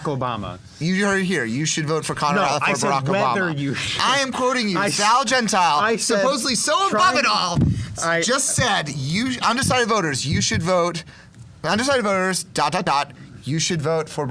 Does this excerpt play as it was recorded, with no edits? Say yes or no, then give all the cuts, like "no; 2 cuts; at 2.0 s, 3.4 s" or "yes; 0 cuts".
yes; 0 cuts